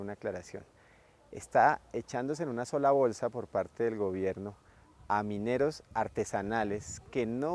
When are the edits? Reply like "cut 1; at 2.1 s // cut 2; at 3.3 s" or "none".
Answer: cut 1; at 2.6 s